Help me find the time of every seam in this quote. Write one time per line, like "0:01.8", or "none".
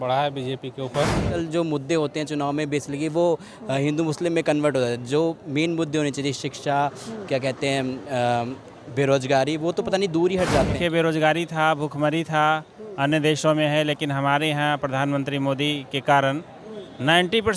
0:01.4
0:10.8

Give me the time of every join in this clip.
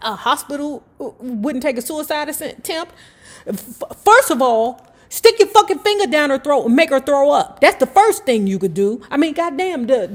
none

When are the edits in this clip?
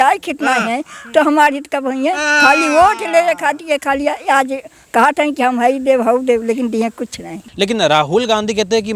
0:07.4

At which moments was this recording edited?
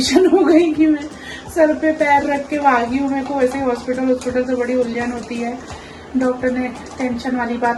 none

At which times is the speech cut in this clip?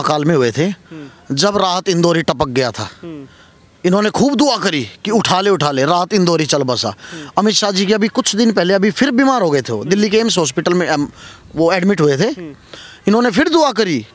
none

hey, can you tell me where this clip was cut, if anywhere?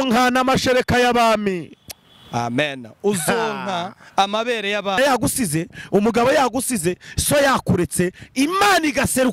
0:05.0

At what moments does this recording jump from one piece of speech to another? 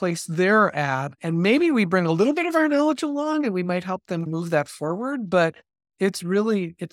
0:01.2
0:04.3

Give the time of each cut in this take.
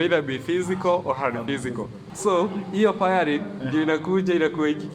0:02.0

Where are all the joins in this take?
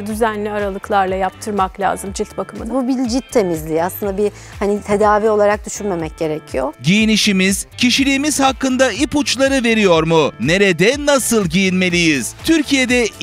0:06.8

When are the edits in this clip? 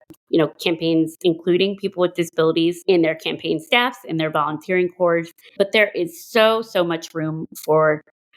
0:02.8
0:05.5

